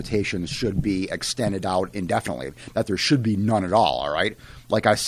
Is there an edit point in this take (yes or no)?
no